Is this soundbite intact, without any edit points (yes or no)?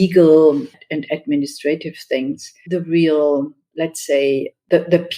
no